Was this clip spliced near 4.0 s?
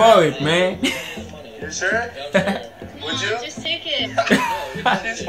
yes; 1 cut; at 4.0 s

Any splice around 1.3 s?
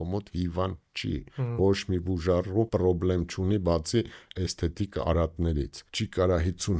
yes; 3 cuts; at 1.3 s, 2.7 s, 5.8 s

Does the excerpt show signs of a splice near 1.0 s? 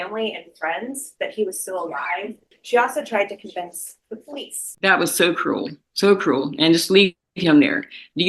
no; 2 cuts; at 2.4 s, 4.6 s

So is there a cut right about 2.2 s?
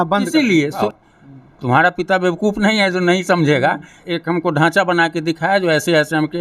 no; 2 cuts; at 0.9 s, 4.0 s

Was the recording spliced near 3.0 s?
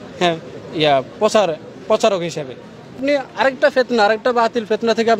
yes; 1 cut; at 3.0 s

